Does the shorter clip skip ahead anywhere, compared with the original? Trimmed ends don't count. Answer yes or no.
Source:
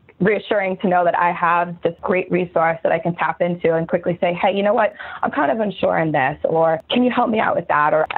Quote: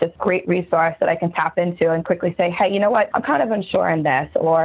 yes